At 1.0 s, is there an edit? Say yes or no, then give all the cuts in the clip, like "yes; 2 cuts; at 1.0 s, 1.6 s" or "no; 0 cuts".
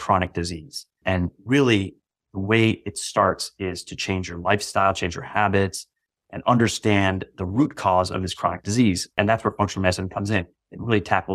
yes; 2 cuts; at 1.0 s, 9.1 s